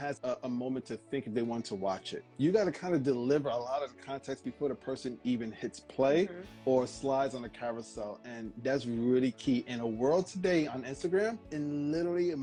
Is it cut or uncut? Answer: uncut